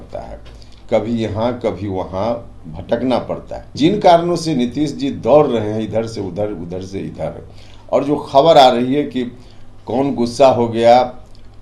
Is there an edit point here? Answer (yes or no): yes